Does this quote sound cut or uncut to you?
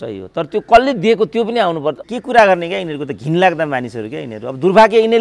cut